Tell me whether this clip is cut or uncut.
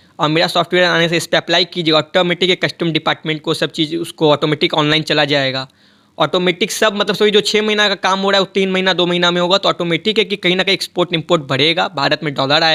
uncut